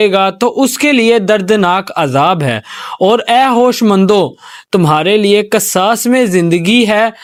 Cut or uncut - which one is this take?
uncut